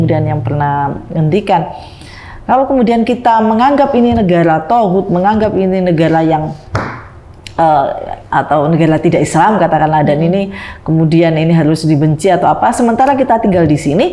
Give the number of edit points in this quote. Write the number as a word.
zero